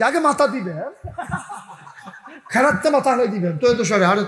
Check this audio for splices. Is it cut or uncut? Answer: uncut